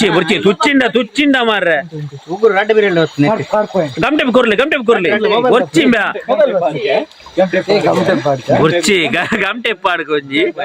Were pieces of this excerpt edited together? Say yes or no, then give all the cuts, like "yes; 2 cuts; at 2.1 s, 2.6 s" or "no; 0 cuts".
no; 0 cuts